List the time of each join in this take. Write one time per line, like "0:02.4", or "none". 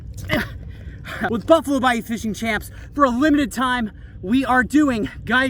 0:01.3